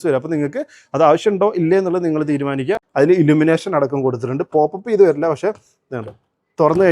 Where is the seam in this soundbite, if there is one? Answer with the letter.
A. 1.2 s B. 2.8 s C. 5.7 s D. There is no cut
B